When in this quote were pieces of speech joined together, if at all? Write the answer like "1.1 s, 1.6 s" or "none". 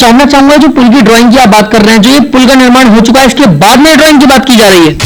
none